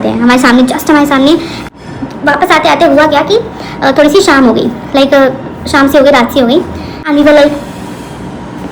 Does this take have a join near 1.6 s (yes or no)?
yes